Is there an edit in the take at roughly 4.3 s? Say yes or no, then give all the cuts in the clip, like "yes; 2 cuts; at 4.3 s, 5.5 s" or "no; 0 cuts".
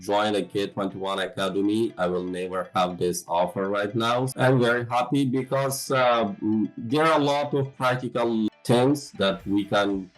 yes; 2 cuts; at 4.3 s, 8.5 s